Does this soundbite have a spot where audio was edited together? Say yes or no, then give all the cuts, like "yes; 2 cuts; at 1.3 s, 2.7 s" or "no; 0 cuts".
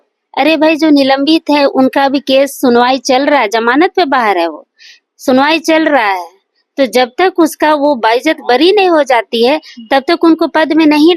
no; 0 cuts